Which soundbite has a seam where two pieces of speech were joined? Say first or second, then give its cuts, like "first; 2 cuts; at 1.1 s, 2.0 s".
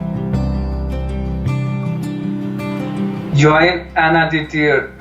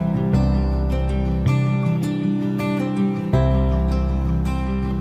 first; 1 cut; at 3.3 s